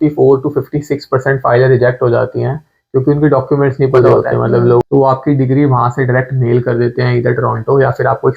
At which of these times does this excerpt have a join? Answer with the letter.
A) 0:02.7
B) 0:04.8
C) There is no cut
B